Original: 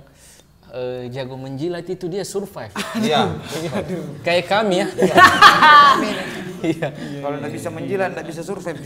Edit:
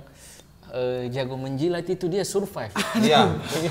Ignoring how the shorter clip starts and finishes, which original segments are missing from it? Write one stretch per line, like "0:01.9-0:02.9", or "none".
none